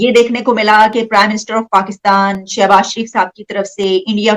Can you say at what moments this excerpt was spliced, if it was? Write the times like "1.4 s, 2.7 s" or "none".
none